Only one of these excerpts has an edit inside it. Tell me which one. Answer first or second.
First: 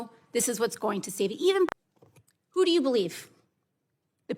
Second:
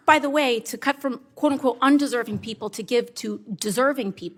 first